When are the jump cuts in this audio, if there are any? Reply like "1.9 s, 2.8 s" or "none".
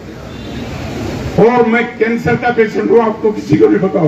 none